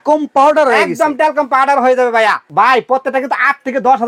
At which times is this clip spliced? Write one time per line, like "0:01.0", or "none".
0:02.5